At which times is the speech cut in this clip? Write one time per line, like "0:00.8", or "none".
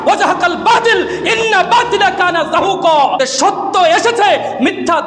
none